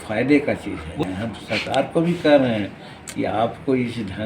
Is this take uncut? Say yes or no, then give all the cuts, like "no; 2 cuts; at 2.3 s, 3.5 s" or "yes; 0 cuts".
no; 1 cut; at 1.0 s